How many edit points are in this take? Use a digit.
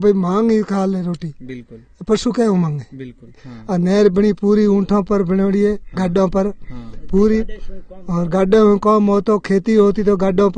1